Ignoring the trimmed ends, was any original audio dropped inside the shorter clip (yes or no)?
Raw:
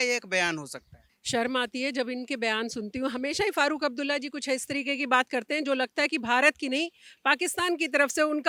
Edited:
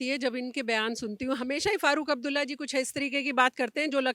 no